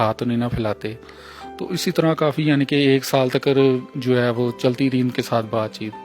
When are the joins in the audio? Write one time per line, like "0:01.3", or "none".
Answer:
none

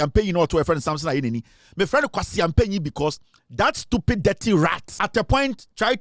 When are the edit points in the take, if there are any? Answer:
0:04.9

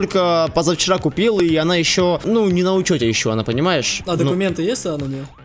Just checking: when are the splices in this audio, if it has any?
0:02.2
0:04.0

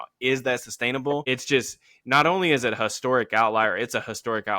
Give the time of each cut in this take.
0:01.2

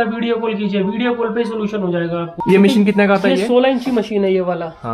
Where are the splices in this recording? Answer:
0:02.4

